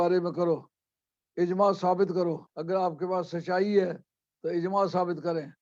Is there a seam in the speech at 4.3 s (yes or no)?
no